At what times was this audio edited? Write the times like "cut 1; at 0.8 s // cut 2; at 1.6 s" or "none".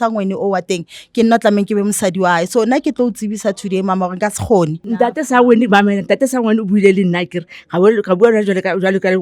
cut 1; at 4.8 s

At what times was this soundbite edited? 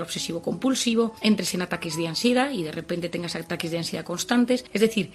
none

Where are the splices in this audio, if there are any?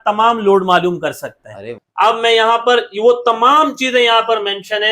cut 1; at 1.8 s

